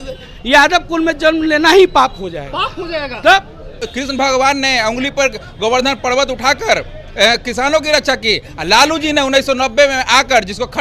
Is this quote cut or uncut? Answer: cut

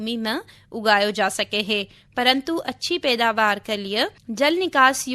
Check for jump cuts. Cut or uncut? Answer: cut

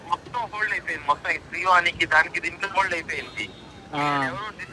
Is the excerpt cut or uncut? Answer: uncut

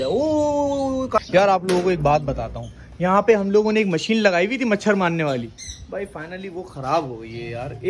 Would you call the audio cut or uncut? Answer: cut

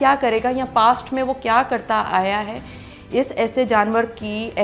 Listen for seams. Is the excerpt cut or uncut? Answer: uncut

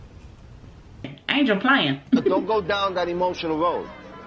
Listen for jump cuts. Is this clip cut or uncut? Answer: cut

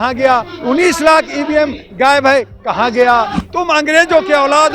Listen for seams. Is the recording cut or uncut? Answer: cut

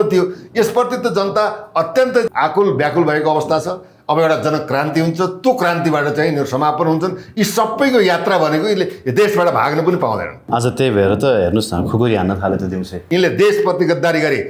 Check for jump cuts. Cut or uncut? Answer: cut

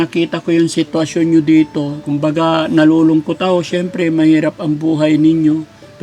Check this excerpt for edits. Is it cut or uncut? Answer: cut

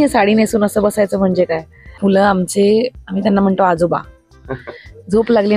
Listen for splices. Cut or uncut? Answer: cut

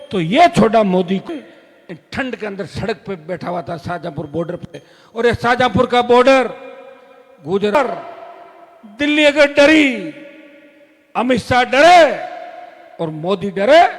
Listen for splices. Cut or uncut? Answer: cut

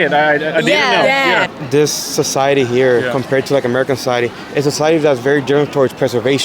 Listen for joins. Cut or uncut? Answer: cut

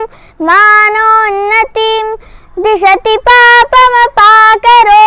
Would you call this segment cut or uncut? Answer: uncut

